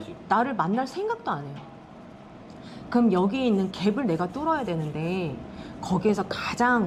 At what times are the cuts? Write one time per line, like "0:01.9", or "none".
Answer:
none